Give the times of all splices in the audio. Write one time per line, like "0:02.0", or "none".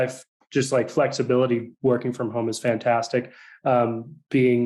none

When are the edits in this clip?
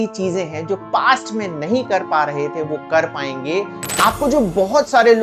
0:03.8

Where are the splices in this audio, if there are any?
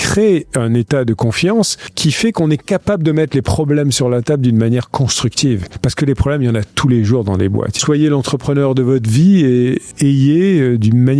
0:01.8
0:05.7
0:07.8
0:09.9

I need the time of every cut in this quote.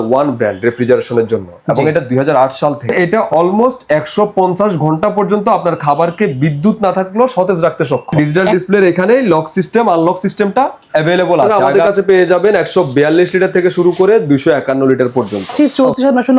0:02.9
0:08.2
0:11.6
0:15.5

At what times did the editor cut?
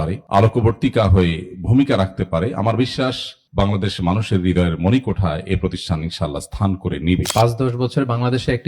0:07.3

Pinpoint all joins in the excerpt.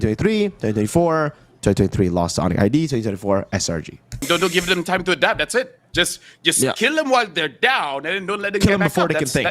0:01.4
0:04.2

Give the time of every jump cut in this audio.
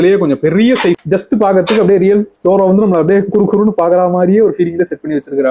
0:01.0

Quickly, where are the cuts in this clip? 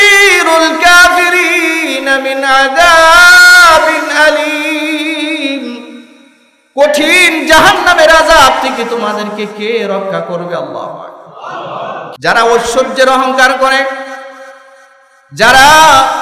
0:12.1

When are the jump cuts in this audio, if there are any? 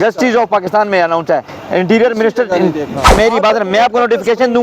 0:03.1

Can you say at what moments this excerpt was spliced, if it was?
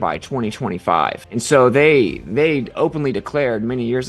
0:01.2

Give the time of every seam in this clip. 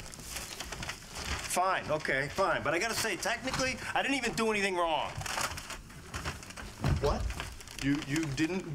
0:04.2

